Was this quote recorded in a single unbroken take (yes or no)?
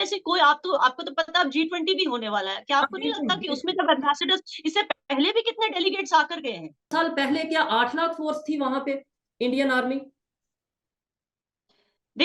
no